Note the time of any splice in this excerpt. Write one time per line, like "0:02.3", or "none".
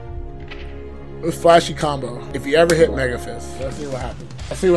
none